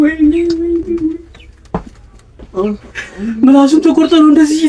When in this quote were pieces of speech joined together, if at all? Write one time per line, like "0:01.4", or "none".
none